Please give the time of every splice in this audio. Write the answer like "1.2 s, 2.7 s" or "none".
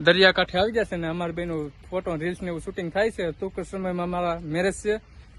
none